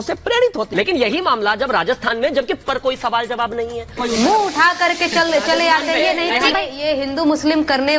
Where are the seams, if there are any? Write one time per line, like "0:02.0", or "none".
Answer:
0:06.5

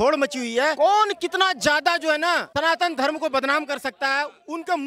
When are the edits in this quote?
none

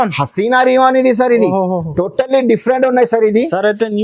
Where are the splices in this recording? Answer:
none

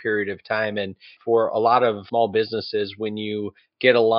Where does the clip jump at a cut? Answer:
0:01.1
0:02.0

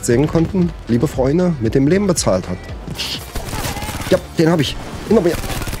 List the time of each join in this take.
0:03.0

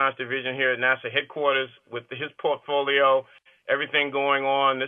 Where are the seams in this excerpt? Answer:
0:01.5

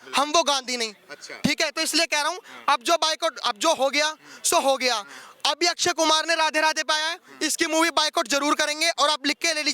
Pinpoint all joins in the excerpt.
none

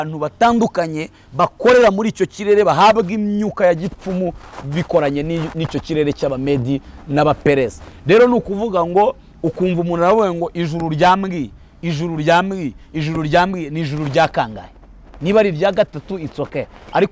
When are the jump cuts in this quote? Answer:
none

